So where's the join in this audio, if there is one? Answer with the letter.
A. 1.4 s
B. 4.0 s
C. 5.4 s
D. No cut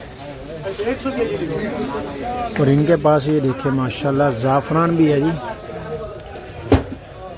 D